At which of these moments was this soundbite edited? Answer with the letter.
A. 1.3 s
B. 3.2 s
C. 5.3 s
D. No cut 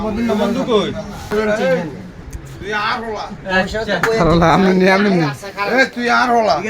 A